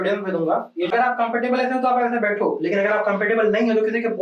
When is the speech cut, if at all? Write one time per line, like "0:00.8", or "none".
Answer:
0:00.9